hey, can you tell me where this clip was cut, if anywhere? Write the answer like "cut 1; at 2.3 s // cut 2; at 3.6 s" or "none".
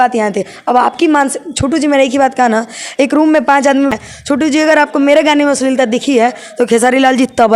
cut 1; at 3.9 s